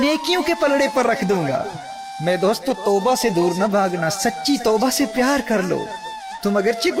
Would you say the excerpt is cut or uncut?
uncut